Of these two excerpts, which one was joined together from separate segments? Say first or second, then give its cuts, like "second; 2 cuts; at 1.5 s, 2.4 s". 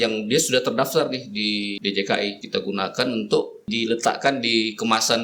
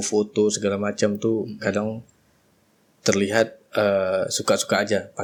first; 3 cuts; at 1.8 s, 2.4 s, 3.7 s